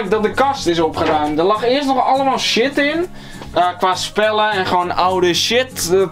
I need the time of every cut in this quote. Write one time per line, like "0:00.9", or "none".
none